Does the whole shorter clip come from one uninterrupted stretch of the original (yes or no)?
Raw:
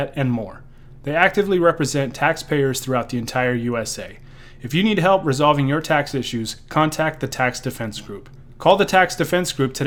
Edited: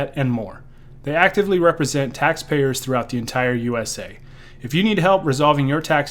yes